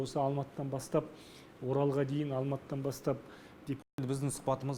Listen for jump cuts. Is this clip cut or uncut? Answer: cut